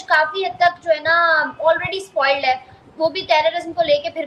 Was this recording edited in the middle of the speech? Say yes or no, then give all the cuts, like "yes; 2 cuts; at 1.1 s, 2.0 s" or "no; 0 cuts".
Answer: no; 0 cuts